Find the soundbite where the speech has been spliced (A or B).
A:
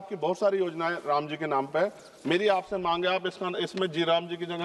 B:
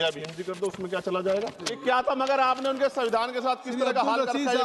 B